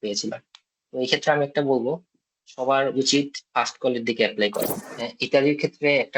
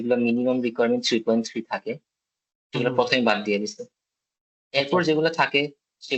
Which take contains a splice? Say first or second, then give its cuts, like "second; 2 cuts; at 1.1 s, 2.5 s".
first; 1 cut; at 4.8 s